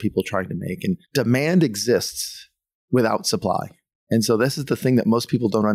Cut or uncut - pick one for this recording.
cut